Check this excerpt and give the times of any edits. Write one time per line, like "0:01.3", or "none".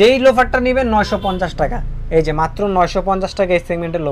none